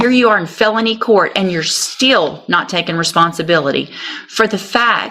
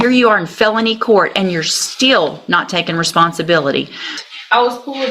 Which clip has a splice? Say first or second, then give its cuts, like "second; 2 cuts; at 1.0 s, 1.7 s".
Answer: second; 1 cut; at 4.2 s